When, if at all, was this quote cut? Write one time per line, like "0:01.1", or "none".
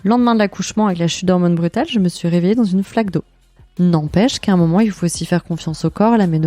0:03.2